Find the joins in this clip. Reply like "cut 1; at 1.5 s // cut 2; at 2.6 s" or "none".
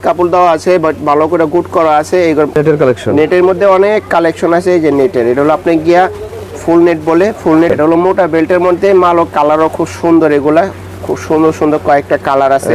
cut 1; at 2.6 s // cut 2; at 7.7 s